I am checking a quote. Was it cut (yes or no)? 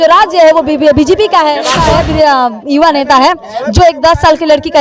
yes